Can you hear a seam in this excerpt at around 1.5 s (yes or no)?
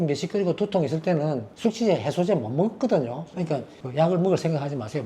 no